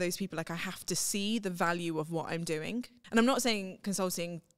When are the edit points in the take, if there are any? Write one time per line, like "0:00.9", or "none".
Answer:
0:03.0